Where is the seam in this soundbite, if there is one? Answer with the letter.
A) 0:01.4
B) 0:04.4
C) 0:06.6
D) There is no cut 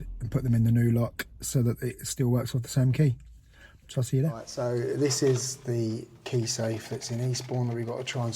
B